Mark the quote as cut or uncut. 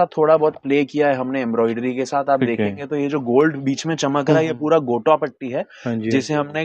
uncut